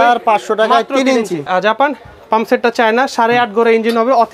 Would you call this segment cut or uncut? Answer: cut